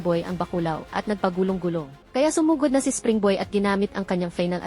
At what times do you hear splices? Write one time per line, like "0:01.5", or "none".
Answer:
0:02.0